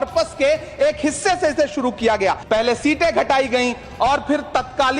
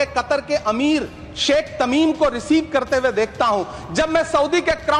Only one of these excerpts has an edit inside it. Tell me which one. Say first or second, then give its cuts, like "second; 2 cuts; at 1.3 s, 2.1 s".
first; 1 cut; at 2.4 s